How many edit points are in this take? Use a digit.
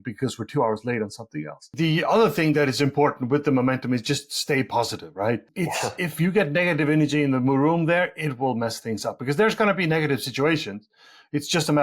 2